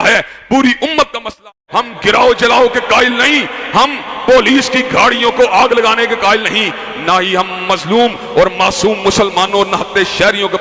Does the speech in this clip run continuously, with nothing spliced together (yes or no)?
no